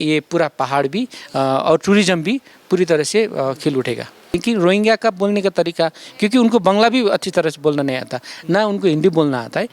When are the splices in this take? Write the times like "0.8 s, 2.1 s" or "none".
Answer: 4.4 s